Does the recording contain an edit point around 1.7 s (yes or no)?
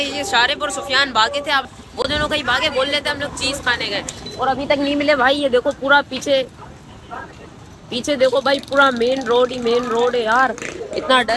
yes